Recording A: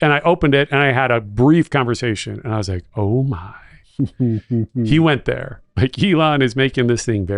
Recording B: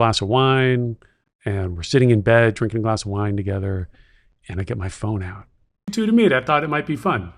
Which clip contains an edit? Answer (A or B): B